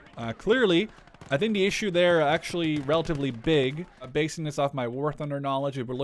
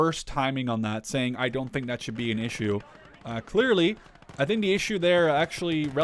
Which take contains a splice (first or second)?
first